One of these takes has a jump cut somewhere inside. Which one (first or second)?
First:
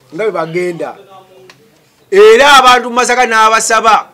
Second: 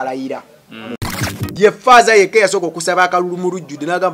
second